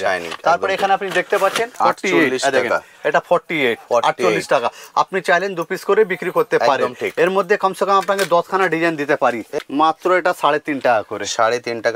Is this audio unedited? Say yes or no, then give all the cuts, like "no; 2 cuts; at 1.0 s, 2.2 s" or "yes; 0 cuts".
no; 2 cuts; at 1.8 s, 9.5 s